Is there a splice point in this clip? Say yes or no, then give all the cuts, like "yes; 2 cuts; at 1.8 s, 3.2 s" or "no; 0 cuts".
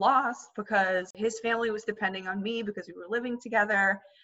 yes; 1 cut; at 1.1 s